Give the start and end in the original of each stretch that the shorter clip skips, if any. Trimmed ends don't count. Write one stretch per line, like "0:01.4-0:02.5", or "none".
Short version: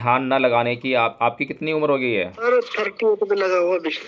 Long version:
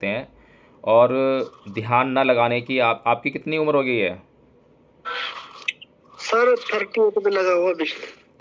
0:04.3-0:06.4